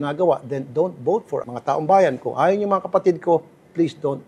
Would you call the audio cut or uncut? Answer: cut